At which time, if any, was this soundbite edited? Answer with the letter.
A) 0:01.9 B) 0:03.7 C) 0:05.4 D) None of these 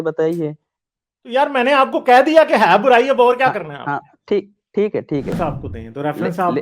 C